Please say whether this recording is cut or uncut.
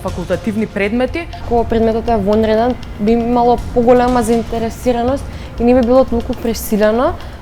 cut